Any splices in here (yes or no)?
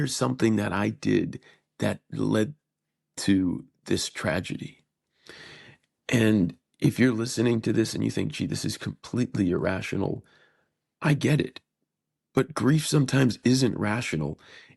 yes